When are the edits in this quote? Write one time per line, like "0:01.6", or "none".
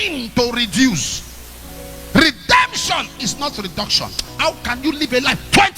0:04.3